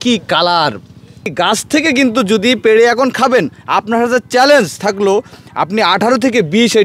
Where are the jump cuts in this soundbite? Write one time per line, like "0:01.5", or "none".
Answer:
0:01.3